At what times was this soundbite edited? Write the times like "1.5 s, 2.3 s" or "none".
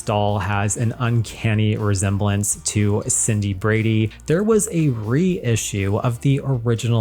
4.1 s

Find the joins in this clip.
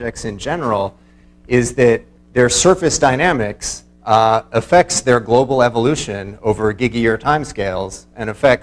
7.7 s

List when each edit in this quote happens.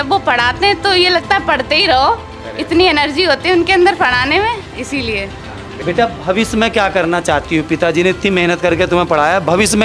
5.7 s

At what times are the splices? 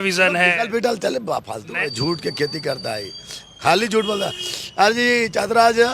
1.7 s

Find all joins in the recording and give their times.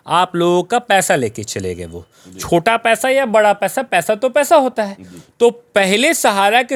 none

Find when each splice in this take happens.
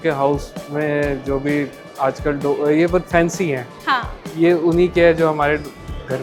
none

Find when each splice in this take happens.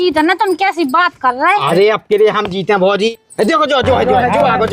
3.1 s

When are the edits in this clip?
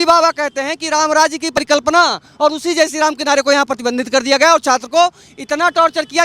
1.6 s

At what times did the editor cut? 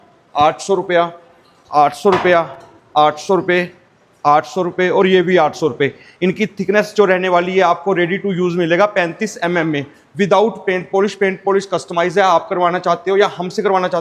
none

